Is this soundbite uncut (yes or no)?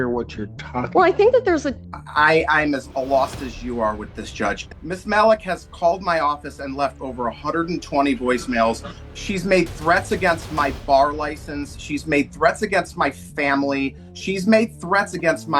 no